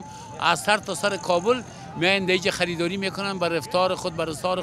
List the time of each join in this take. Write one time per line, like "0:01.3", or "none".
none